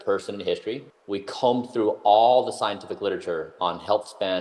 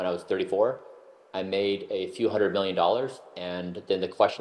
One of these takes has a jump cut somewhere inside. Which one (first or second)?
first